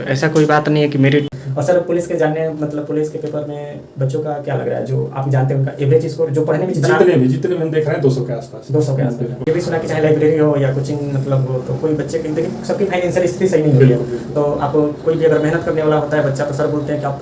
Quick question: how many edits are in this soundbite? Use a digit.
2